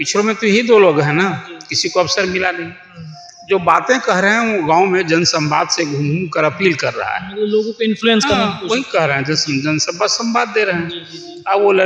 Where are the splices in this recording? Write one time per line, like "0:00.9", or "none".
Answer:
none